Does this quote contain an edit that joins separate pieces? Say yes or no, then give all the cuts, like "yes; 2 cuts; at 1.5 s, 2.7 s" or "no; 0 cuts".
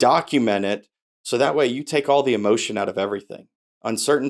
no; 0 cuts